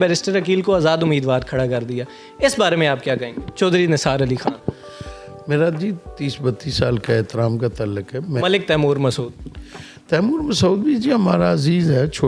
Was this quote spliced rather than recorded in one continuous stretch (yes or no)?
yes